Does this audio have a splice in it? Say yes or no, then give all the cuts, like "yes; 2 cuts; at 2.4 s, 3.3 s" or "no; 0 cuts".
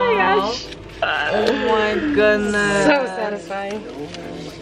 no; 0 cuts